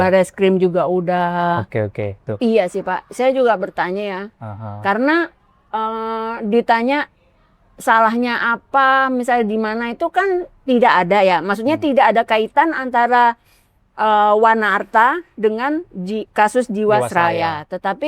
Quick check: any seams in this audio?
yes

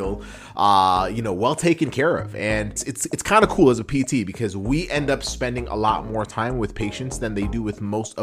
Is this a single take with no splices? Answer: no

